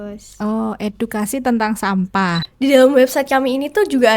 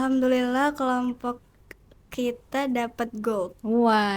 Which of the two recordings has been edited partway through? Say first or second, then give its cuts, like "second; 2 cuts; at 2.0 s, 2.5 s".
first; 1 cut; at 2.4 s